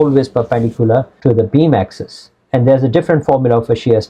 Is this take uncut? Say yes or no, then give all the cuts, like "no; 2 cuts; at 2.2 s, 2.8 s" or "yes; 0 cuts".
no; 1 cut; at 1.1 s